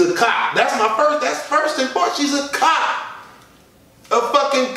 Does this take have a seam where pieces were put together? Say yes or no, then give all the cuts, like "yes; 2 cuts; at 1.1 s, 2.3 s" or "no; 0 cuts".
no; 0 cuts